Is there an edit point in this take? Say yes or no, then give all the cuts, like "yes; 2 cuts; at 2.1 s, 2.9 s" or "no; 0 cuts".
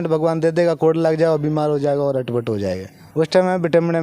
yes; 1 cut; at 2.9 s